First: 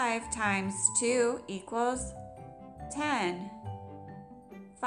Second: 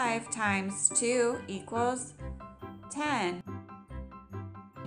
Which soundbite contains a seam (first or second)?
second